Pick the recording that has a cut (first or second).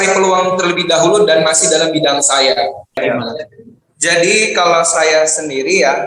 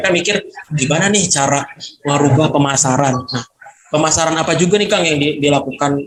first